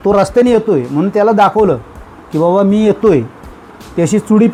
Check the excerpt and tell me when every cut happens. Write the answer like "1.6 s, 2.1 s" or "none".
none